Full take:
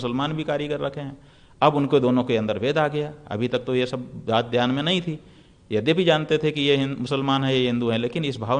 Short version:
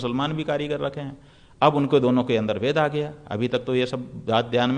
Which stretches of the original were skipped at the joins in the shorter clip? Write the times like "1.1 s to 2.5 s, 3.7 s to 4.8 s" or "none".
none